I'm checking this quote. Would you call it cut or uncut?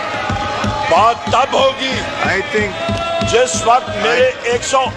uncut